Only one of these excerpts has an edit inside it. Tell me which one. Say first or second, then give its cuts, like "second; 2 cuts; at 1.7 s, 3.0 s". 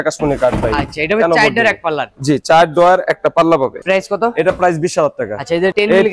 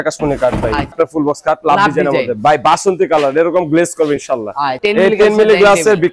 second; 2 cuts; at 1.0 s, 4.8 s